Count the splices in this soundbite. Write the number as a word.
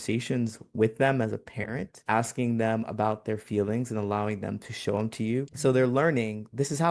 one